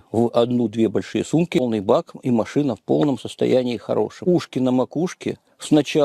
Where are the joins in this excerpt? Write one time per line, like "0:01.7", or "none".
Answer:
0:01.6
0:04.2